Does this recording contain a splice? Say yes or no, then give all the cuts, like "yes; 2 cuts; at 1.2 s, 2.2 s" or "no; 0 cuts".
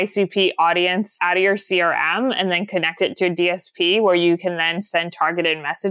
yes; 1 cut; at 1.1 s